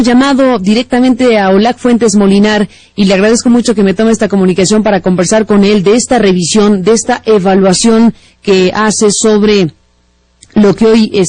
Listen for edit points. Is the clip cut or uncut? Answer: uncut